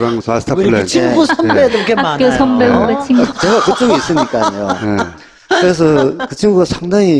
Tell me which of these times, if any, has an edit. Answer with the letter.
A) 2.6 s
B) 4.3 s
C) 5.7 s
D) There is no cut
A